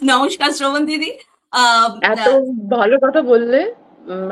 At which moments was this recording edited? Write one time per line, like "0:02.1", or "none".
none